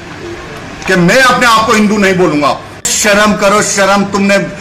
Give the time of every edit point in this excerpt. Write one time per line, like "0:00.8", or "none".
0:02.9